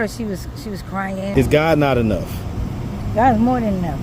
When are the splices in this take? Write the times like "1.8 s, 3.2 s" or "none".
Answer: 1.3 s